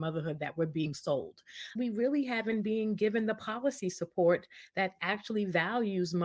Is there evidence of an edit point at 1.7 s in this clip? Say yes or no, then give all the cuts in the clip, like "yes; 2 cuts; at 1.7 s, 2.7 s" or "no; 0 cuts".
yes; 1 cut; at 1.7 s